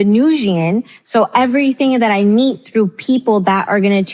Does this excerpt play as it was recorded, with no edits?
yes; 0 cuts

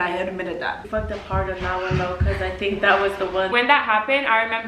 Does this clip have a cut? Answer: yes; 2 cuts; at 0.8 s, 3.5 s

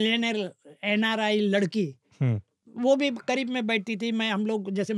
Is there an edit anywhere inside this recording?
yes; 1 cut; at 2.6 s

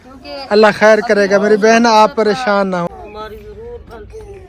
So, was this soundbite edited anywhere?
yes; 1 cut; at 2.9 s

